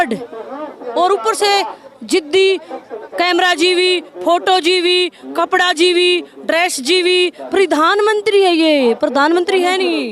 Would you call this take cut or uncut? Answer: uncut